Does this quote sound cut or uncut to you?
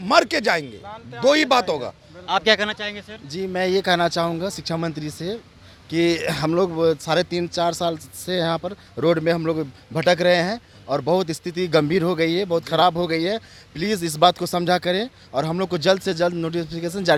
uncut